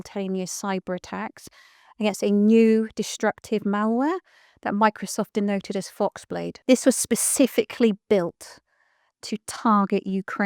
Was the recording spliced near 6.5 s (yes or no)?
yes